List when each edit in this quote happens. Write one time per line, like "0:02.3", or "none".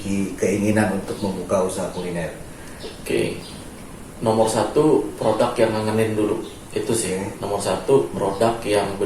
0:03.4